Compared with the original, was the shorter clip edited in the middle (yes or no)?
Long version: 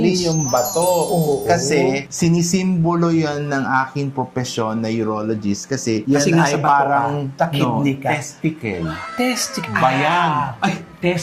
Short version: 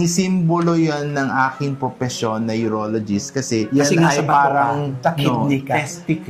no